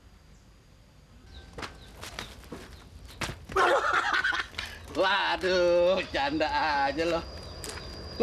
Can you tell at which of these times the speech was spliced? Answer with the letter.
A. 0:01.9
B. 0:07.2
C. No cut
C